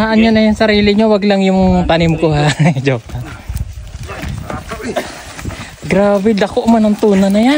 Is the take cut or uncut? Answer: uncut